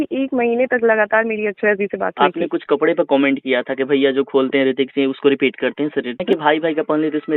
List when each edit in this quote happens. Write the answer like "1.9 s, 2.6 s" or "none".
2.2 s, 6.2 s